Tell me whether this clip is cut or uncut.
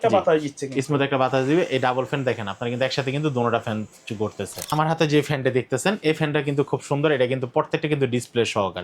cut